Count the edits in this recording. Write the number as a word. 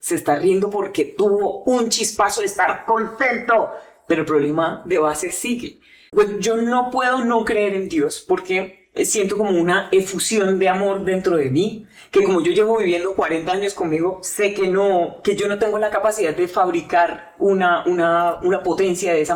one